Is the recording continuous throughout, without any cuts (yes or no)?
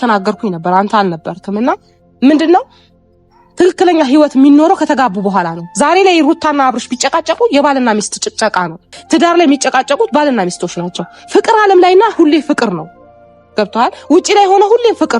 no